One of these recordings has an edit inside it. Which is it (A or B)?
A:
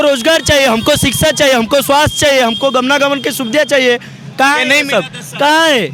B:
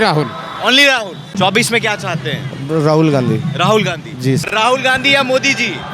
B